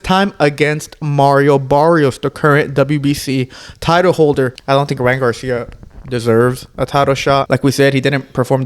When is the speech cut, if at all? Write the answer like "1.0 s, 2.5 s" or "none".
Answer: 4.6 s, 7.5 s